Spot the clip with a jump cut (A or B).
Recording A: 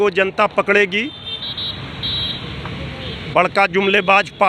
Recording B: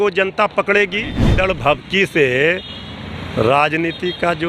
B